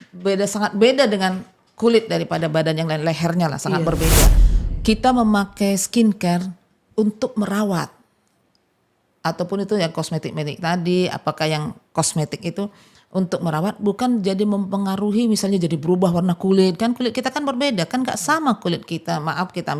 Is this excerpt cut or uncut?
cut